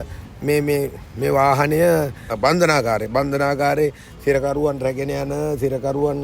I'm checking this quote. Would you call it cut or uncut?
cut